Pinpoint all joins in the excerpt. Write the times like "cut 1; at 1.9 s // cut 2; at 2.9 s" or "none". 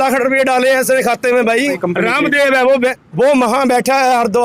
cut 1; at 1.8 s // cut 2; at 3.0 s